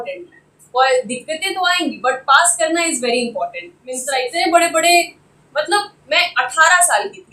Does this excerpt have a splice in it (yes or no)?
yes